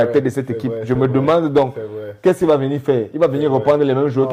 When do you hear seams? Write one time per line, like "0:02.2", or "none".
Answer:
none